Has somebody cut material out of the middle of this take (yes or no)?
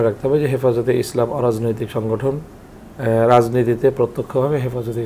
no